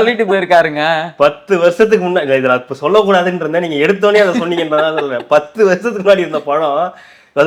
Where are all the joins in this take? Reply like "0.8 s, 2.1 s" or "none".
none